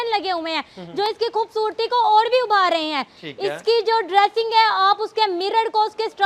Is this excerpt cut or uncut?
uncut